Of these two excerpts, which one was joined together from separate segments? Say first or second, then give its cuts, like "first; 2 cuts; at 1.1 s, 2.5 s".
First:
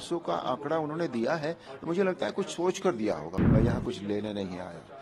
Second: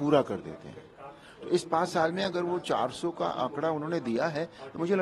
first; 1 cut; at 3.3 s